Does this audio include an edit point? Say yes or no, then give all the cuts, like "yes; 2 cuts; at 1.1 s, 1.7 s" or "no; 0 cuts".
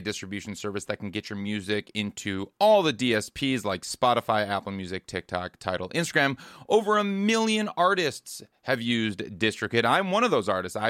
no; 0 cuts